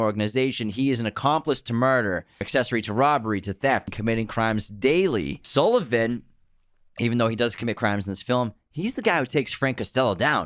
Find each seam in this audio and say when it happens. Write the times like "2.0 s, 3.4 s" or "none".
2.5 s, 3.9 s, 5.4 s